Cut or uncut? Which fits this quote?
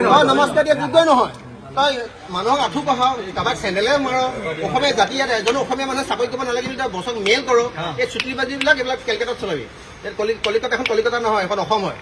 uncut